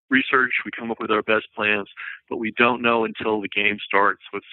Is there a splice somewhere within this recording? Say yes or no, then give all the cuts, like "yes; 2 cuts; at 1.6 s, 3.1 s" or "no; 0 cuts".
no; 0 cuts